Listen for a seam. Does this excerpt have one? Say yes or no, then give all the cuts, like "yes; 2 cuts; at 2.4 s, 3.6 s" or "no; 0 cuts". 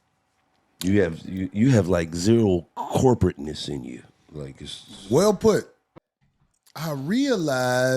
yes; 1 cut; at 6.0 s